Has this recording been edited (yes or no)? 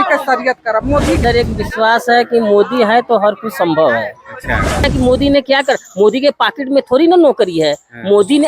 yes